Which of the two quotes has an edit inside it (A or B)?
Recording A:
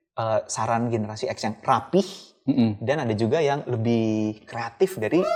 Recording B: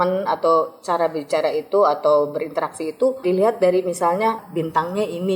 B